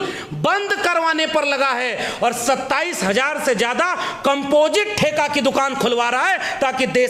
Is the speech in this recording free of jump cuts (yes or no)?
yes